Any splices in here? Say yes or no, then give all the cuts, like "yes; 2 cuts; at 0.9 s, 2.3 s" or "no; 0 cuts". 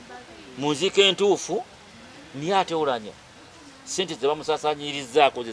no; 0 cuts